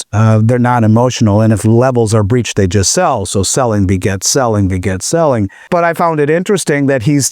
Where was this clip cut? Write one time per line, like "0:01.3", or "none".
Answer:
0:05.6